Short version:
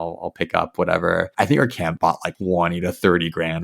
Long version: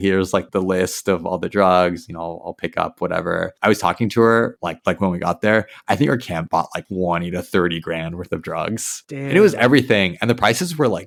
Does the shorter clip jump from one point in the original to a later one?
yes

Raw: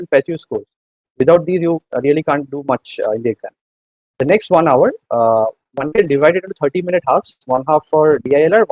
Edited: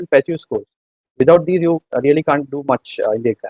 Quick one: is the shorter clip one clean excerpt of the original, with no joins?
yes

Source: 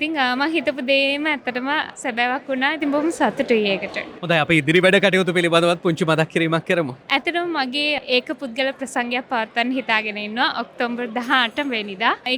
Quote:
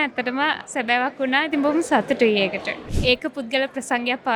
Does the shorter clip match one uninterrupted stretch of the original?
no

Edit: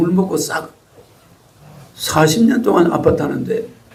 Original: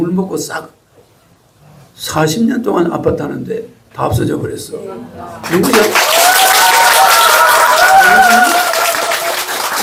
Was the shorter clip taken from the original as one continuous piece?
yes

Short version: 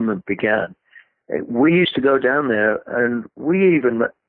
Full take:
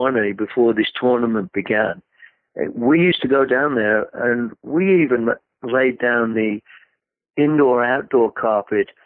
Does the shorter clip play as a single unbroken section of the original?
yes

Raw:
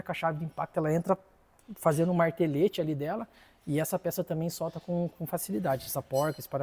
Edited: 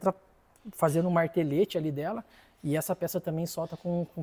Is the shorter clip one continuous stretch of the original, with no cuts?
yes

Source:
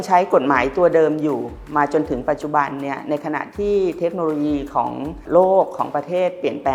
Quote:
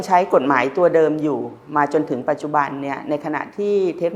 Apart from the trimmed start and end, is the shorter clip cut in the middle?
no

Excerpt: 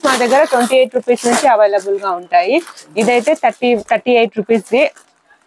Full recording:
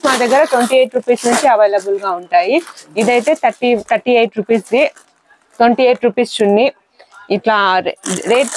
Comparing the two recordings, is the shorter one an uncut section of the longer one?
yes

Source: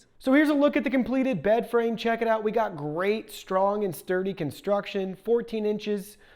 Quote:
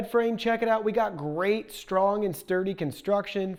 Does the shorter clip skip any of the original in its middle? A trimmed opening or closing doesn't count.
no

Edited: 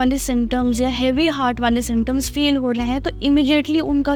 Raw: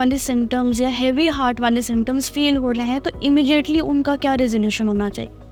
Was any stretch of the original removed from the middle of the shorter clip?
no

